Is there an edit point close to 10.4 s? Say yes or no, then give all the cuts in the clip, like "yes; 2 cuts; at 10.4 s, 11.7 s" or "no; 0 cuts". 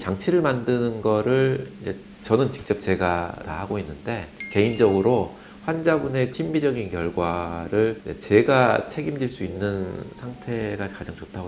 no; 2 cuts; at 6.3 s, 8.1 s